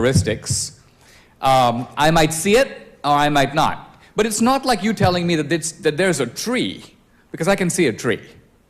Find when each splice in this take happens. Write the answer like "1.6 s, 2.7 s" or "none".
5.5 s